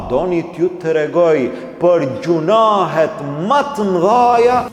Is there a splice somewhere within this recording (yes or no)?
no